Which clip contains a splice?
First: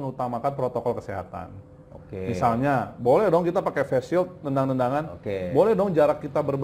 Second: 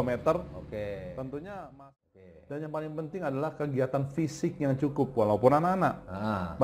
second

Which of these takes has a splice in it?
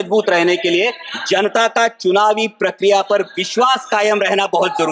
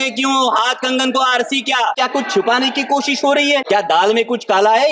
second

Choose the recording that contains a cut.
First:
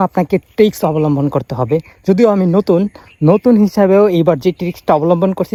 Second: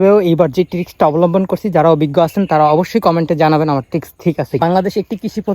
second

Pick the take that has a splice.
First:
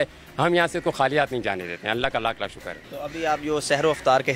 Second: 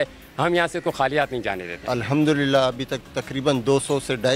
second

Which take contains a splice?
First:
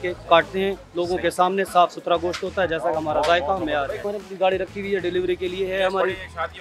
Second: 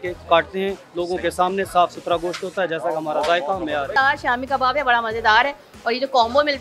second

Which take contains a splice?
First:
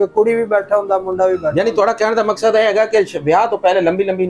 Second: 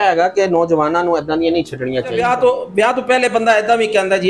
second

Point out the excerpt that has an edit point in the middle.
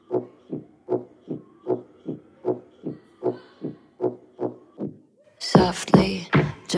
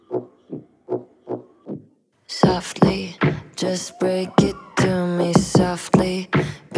second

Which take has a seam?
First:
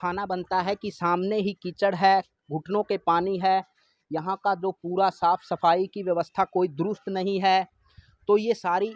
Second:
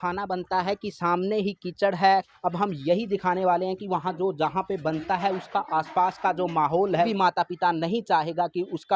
second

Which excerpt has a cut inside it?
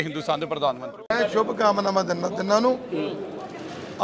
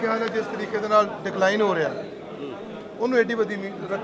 first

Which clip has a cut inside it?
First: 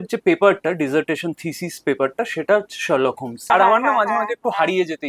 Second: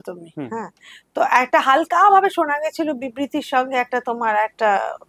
first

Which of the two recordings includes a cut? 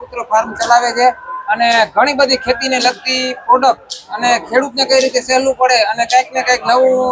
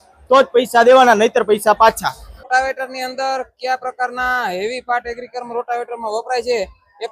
second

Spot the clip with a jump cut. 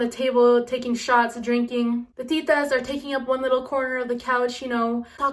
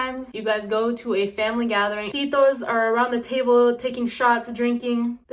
second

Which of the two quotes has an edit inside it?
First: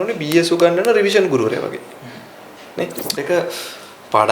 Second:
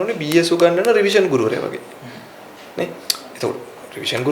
first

